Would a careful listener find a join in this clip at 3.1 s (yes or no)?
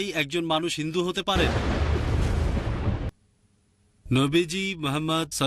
yes